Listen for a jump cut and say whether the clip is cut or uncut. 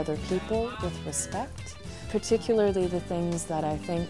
cut